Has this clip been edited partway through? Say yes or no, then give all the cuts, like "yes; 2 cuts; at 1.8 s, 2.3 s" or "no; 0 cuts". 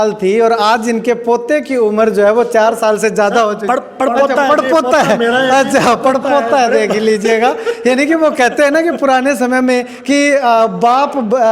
no; 0 cuts